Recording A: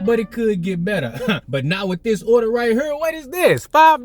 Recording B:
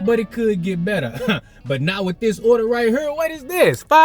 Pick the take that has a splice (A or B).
A